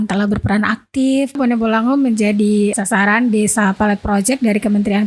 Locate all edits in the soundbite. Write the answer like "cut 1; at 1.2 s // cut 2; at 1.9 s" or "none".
cut 1; at 1.4 s // cut 2; at 2.7 s